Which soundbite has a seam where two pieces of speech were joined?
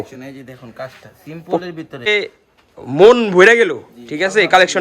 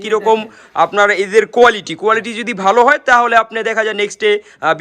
first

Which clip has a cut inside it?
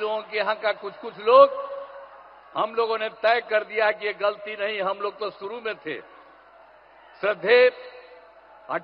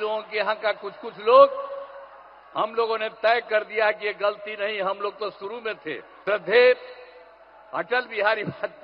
second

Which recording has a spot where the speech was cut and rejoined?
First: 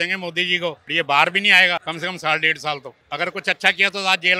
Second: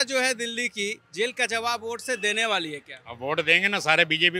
first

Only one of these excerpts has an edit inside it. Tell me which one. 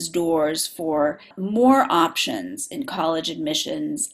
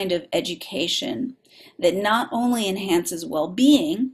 first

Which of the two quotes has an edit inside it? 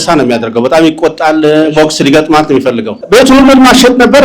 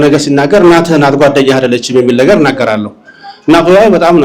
first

